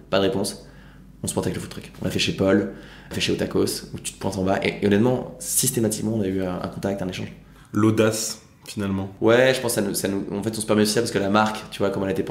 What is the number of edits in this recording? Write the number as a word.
zero